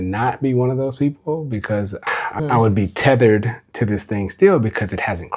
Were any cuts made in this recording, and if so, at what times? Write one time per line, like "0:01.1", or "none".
0:02.4